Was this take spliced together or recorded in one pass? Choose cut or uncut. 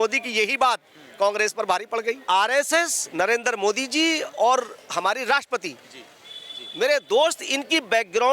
cut